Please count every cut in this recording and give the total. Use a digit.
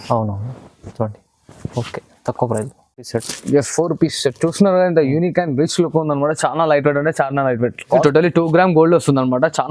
2